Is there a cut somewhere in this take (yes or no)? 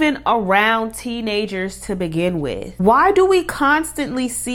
no